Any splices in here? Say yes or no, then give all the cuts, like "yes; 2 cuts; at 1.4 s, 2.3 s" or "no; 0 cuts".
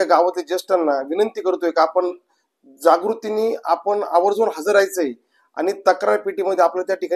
no; 0 cuts